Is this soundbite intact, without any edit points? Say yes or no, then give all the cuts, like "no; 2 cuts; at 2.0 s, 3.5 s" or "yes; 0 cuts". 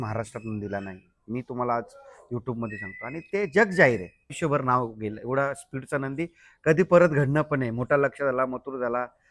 no; 1 cut; at 4.4 s